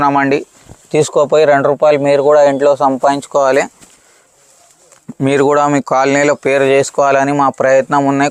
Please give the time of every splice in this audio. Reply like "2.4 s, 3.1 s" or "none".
none